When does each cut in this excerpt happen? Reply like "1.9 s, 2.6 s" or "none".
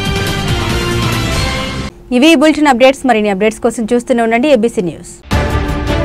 none